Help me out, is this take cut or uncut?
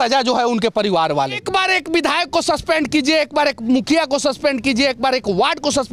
cut